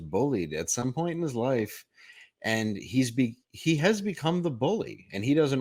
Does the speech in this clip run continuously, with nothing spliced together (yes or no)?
yes